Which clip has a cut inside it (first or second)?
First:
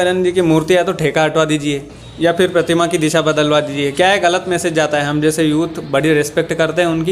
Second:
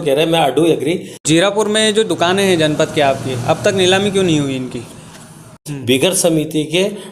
second